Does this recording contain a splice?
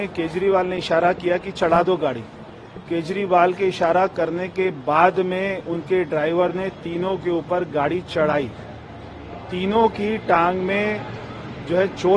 no; 0 cuts

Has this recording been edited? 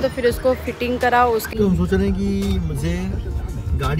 yes; 1 cut; at 1.5 s

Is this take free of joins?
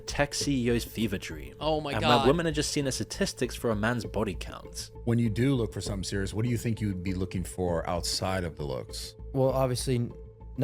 yes; 0 cuts

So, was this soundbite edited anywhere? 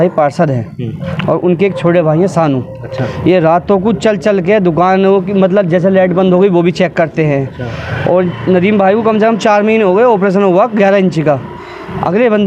no; 0 cuts

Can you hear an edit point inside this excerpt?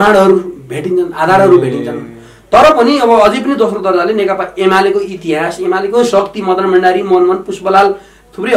no; 0 cuts

